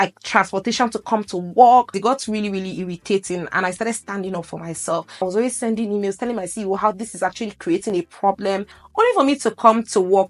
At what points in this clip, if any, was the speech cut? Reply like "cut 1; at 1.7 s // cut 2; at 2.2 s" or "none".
cut 1; at 2.0 s // cut 2; at 5.2 s // cut 3; at 8.8 s

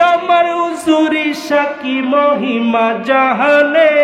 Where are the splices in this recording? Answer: none

